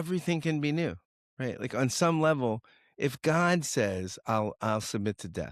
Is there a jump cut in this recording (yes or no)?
no